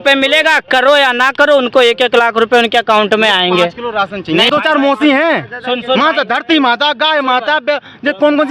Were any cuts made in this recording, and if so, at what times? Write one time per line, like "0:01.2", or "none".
0:04.5